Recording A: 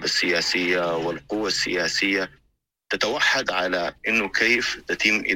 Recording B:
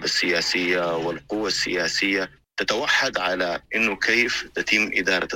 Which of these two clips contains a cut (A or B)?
B